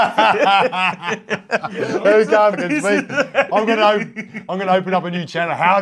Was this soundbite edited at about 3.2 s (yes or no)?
yes